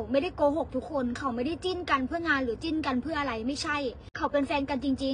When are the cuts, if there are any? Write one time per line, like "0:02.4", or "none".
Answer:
0:04.1